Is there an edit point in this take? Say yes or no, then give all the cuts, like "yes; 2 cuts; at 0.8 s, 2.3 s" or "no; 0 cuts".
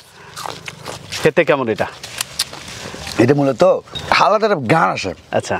yes; 1 cut; at 1.2 s